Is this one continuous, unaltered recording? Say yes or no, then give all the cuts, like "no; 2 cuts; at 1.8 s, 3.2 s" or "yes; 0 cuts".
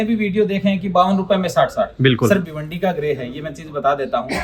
yes; 0 cuts